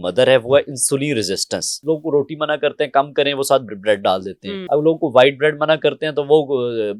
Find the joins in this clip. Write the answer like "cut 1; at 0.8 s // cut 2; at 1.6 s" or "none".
cut 1; at 1.8 s // cut 2; at 4.5 s